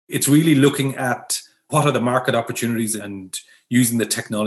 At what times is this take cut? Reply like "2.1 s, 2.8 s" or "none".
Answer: 1.7 s, 3.0 s